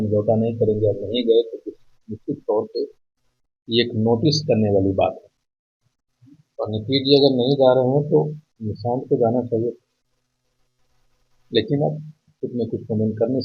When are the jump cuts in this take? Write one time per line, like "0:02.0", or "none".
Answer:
none